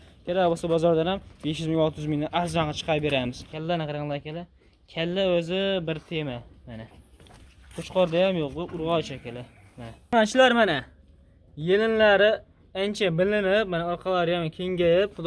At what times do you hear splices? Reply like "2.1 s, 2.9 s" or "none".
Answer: 3.5 s, 10.1 s